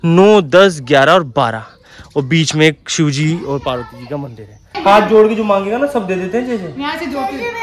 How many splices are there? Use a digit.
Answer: 1